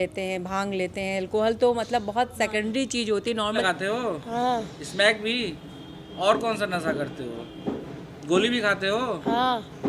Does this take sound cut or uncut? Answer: cut